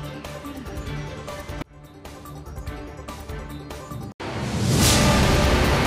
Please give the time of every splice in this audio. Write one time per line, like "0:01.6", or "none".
0:04.1